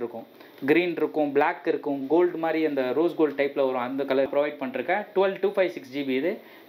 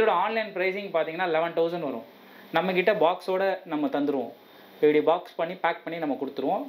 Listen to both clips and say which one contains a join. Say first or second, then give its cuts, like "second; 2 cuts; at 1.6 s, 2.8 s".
first; 1 cut; at 4.3 s